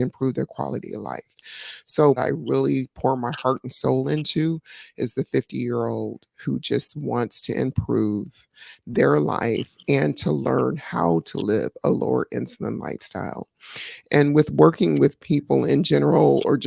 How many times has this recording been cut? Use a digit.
0